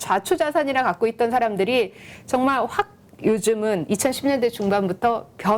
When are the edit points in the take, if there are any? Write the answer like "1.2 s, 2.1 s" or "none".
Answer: none